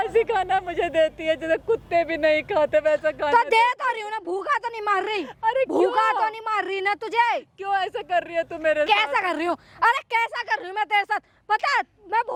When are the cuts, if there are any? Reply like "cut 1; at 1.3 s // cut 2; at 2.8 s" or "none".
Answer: none

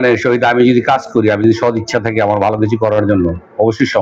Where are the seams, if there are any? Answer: none

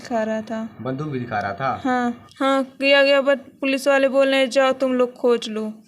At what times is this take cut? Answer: cut 1; at 2.2 s

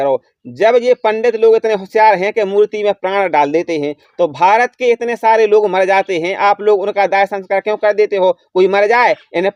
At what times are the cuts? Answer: none

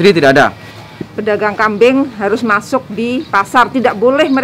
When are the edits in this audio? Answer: cut 1; at 1.1 s

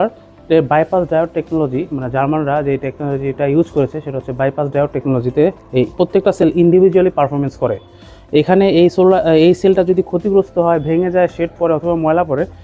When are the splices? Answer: none

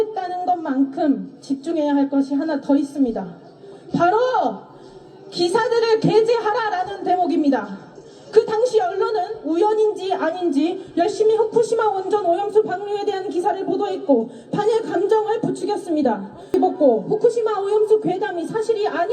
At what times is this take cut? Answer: cut 1; at 16.5 s

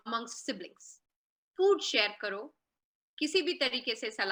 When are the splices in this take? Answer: none

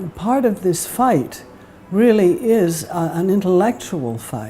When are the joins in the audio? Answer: cut 1; at 1.5 s

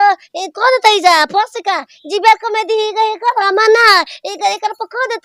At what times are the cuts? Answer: none

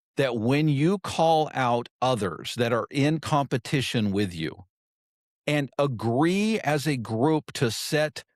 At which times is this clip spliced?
none

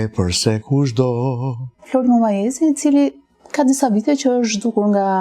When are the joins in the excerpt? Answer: cut 1; at 1.8 s

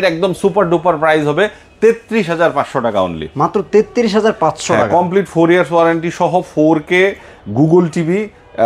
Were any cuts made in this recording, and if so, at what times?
none

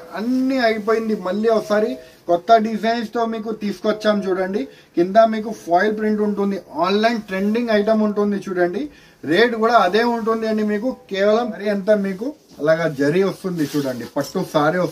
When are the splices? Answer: cut 1; at 11.6 s

